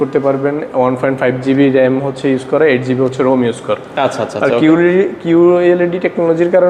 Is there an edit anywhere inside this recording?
no; 0 cuts

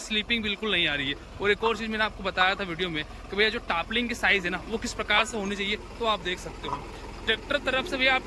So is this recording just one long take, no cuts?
yes; 0 cuts

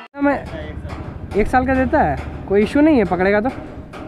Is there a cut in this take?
no; 0 cuts

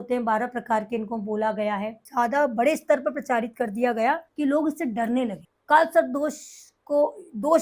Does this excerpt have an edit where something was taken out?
yes; 3 cuts; at 2.0 s, 4.3 s, 5.5 s

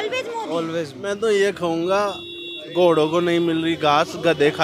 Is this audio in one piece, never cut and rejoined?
no; 1 cut; at 1.0 s

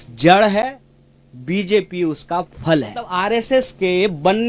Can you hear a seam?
yes; 1 cut; at 3.1 s

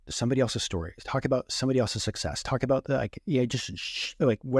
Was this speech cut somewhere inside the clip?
no; 0 cuts

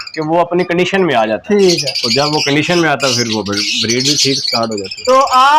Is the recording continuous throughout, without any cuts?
yes; 0 cuts

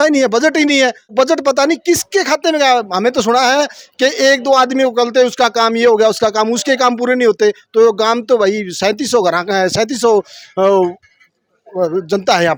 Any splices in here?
no; 0 cuts

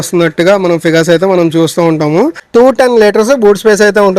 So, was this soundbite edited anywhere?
yes; 1 cut; at 2.4 s

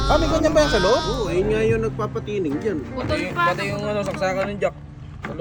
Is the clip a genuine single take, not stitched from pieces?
yes; 0 cuts

